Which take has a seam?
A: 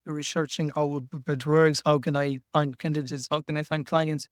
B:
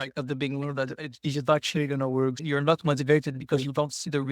B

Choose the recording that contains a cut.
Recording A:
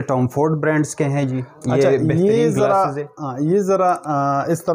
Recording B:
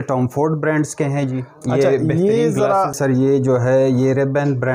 B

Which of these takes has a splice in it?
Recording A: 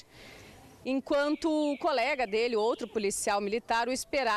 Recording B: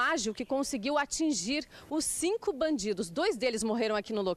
A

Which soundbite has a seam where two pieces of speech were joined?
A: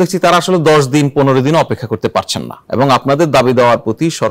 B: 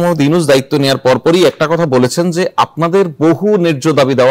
A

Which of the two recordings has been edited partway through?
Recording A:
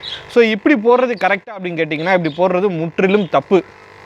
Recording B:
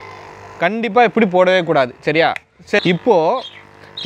B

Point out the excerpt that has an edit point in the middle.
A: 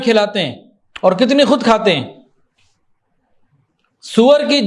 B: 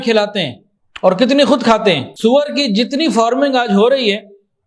B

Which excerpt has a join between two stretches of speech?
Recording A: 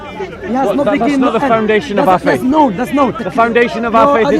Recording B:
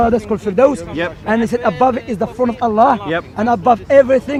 A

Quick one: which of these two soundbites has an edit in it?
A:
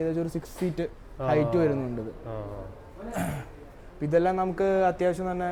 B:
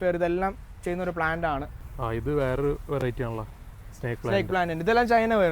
B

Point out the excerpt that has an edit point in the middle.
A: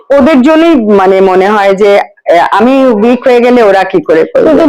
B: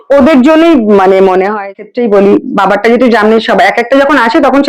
B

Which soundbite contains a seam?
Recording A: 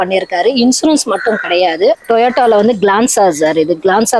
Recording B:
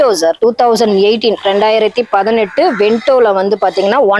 A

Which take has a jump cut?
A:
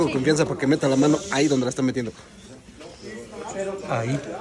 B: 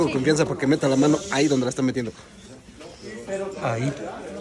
B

